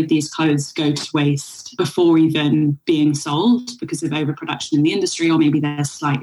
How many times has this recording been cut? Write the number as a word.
one